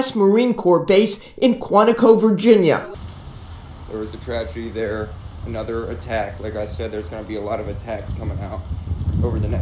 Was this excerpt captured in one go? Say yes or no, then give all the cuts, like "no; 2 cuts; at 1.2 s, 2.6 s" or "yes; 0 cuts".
no; 1 cut; at 2.9 s